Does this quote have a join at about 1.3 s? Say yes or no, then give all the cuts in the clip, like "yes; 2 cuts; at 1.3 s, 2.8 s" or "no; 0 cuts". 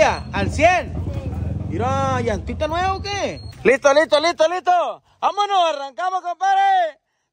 no; 1 cut; at 3.5 s